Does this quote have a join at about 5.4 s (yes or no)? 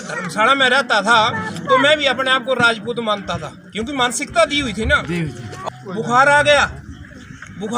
no